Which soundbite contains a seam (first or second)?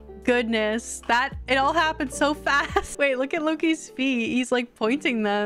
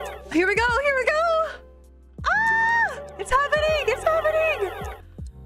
first